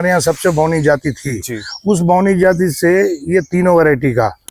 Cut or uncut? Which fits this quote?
uncut